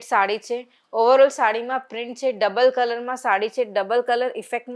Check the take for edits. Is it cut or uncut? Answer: uncut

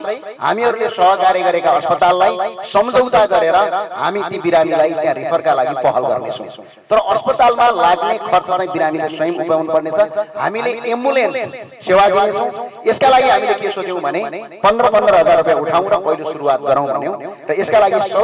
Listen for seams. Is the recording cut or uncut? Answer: uncut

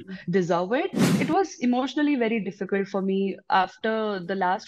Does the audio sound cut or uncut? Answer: cut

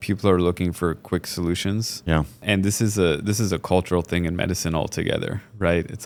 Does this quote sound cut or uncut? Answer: uncut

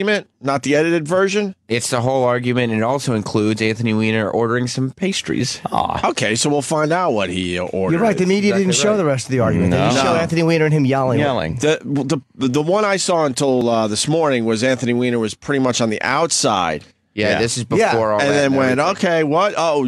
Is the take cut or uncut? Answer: uncut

